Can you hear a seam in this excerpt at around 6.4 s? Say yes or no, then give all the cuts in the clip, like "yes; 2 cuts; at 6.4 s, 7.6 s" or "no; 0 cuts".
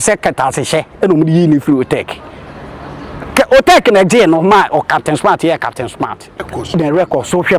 yes; 1 cut; at 6.4 s